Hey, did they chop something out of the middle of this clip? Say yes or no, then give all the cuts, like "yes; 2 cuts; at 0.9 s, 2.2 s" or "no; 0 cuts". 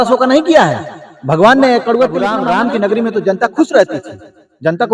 yes; 1 cut; at 2.3 s